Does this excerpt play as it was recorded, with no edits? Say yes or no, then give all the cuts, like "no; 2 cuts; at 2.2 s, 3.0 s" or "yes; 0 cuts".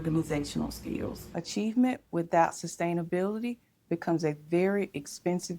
no; 1 cut; at 1.3 s